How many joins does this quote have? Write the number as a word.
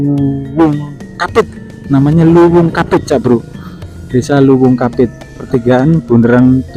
one